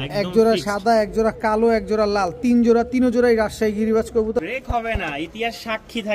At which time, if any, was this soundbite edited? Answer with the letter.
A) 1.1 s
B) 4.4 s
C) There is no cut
B